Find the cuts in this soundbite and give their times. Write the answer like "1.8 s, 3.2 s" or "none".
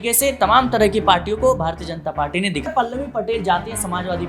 2.7 s

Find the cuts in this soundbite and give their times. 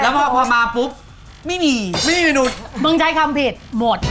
none

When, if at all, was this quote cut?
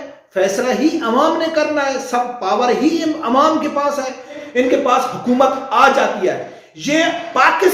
4.4 s

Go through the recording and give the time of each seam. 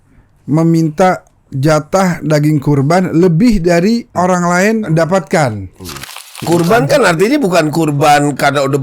4.1 s, 4.9 s, 6.3 s

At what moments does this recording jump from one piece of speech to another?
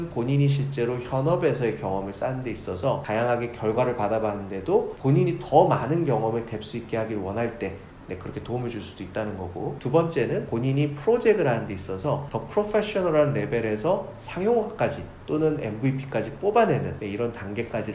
3.0 s

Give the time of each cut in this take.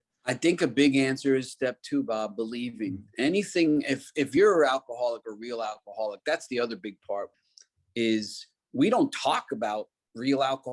7.4 s

